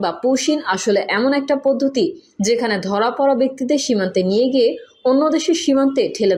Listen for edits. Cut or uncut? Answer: uncut